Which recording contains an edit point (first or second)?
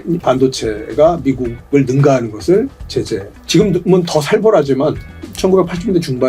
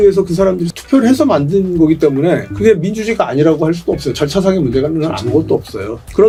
first